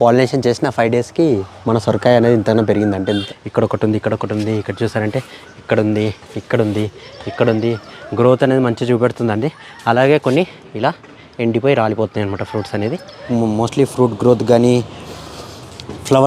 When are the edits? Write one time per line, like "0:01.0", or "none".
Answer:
0:03.2
0:13.3